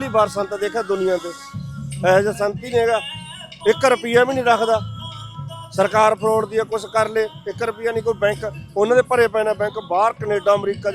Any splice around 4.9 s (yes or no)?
no